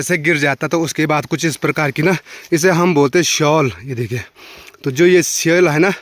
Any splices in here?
no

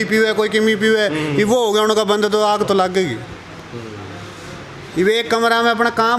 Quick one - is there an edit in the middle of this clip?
no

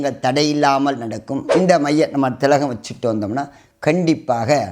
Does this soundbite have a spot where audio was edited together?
yes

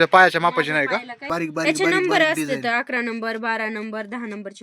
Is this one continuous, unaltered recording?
no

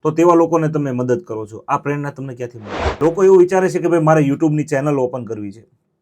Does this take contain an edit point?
yes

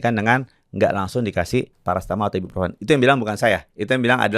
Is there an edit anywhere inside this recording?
yes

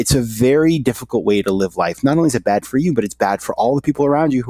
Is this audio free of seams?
yes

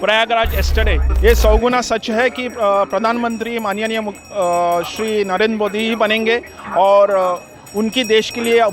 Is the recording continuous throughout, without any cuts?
no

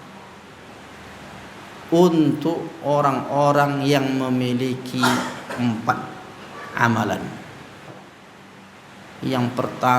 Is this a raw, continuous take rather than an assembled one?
no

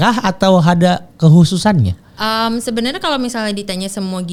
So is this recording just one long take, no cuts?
yes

